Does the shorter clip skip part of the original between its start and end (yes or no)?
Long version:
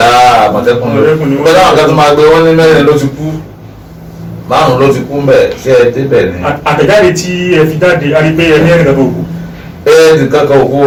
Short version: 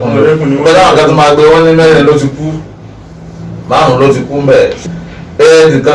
yes